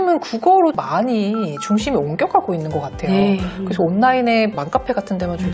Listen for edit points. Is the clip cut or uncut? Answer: uncut